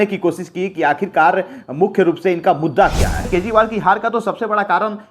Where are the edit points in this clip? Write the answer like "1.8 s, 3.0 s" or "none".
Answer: 3.3 s